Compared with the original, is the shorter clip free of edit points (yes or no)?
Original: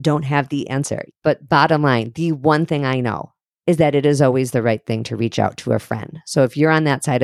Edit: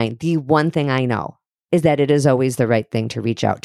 yes